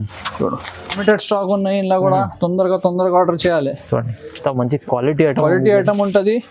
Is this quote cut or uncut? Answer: cut